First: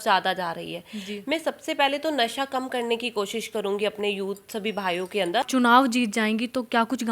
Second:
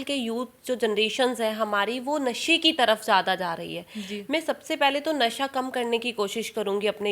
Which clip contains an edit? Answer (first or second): first